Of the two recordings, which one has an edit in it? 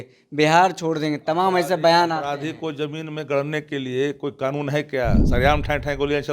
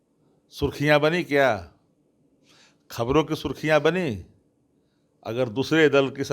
first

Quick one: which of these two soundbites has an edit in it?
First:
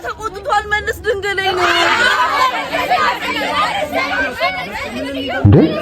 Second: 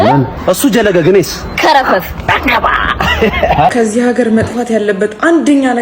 second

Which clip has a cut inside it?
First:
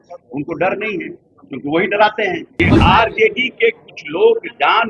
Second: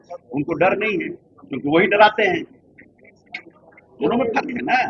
first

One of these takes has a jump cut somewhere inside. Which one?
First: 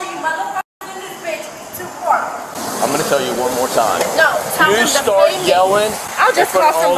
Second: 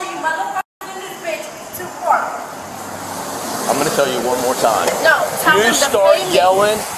first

